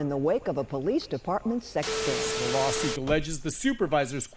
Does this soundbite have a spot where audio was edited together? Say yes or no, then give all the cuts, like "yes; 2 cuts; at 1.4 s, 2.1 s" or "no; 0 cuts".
yes; 1 cut; at 2.3 s